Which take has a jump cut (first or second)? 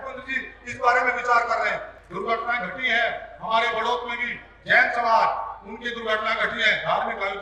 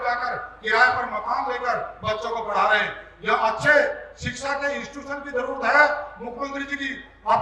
first